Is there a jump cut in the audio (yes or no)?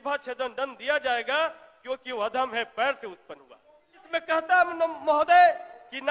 yes